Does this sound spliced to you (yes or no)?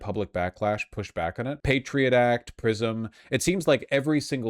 yes